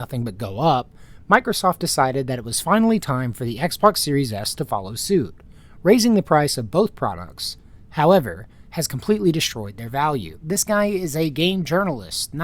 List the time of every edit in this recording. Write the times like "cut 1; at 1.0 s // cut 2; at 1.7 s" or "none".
cut 1; at 10.3 s